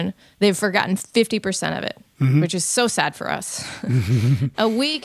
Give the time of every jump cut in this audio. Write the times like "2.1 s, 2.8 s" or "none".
none

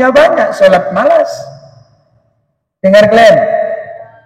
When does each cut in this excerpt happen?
none

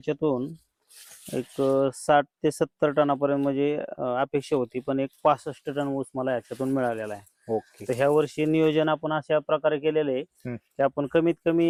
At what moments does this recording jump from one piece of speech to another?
none

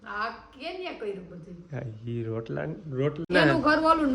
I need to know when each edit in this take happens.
3.2 s

